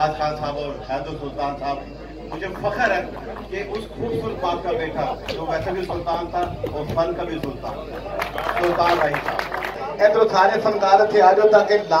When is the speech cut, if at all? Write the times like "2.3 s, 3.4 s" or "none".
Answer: 9.8 s